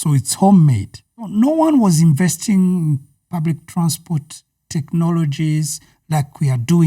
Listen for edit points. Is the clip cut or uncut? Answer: cut